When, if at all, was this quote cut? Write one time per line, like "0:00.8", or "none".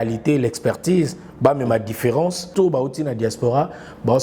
0:02.5